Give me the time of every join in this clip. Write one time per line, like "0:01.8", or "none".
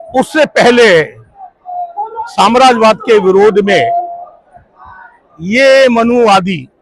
none